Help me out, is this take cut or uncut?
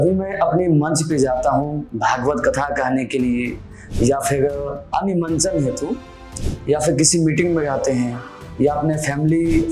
cut